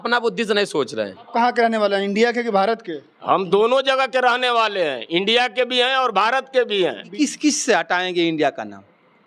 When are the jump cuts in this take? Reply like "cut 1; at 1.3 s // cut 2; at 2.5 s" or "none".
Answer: cut 1; at 1.3 s // cut 2; at 7.1 s